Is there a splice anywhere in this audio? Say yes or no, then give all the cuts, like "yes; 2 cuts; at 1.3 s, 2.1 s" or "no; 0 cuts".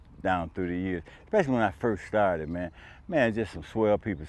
no; 0 cuts